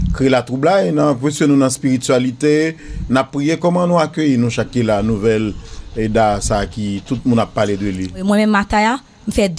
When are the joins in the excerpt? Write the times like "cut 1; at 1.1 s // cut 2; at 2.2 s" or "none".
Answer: cut 1; at 8.2 s